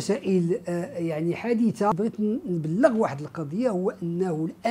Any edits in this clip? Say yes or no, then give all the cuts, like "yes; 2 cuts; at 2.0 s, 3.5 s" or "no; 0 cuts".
yes; 1 cut; at 1.9 s